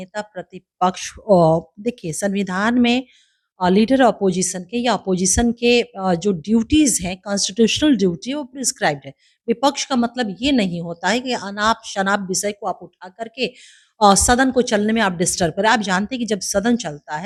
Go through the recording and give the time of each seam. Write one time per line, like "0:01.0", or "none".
none